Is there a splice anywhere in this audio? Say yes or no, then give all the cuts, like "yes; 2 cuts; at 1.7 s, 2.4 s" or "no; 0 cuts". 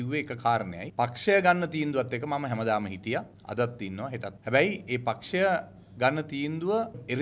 no; 0 cuts